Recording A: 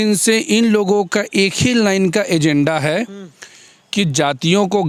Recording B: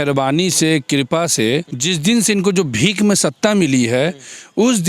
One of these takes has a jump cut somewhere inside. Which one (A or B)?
B